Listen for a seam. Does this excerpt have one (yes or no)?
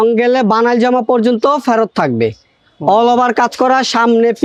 no